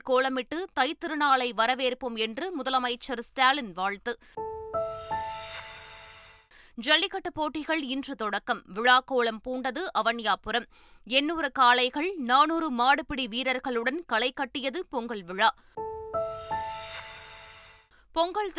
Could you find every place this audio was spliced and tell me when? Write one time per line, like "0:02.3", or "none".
none